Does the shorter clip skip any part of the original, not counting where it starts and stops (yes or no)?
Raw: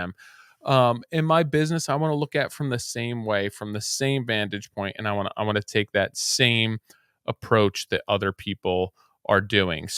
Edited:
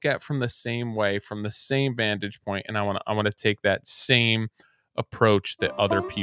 no